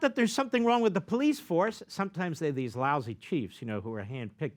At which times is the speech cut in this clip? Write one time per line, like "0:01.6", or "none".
none

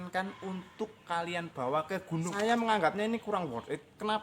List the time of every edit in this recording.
0:02.3

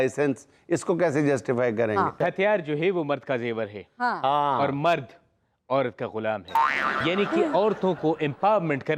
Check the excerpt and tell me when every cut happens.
0:02.2
0:06.7

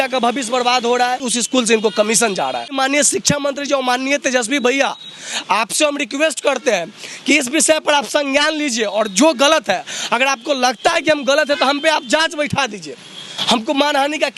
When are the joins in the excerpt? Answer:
0:01.2
0:02.8

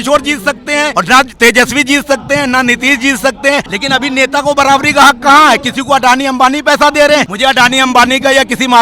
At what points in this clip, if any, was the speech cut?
0:00.9
0:03.7
0:07.3

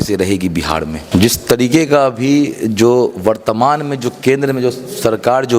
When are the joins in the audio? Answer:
0:01.0

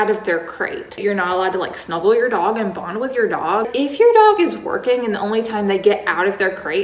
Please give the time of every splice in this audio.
0:01.0
0:03.7

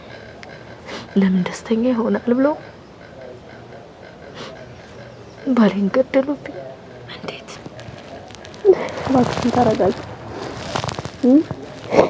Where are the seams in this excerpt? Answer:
0:07.5

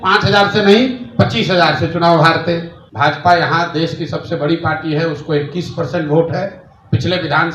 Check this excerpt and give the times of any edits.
0:02.8

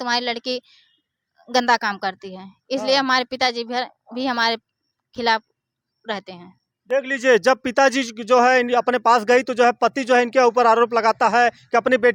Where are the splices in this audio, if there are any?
none

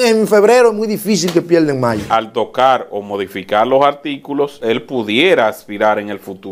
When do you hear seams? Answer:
0:02.0
0:04.6

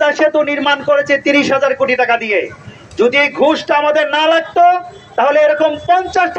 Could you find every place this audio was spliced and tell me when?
none

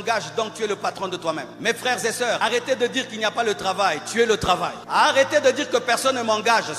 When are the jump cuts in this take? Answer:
0:01.5
0:02.4
0:04.8

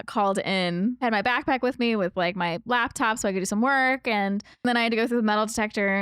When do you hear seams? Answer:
0:01.0
0:04.7

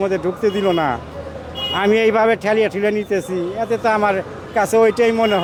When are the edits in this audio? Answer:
none

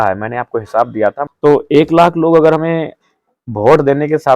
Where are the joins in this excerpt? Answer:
0:01.3

